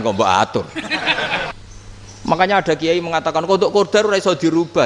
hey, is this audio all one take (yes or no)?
no